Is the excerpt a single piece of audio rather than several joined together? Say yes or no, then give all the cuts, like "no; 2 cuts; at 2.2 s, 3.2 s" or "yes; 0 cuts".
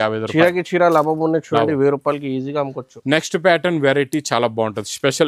yes; 0 cuts